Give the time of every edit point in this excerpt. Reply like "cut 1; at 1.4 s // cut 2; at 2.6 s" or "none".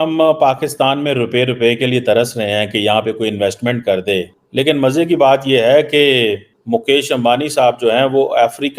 cut 1; at 4.4 s // cut 2; at 6.5 s